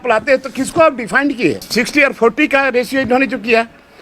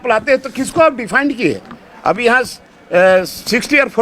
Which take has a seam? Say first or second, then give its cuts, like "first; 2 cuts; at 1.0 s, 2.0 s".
first; 1 cut; at 1.6 s